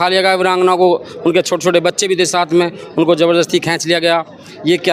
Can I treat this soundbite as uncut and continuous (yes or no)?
yes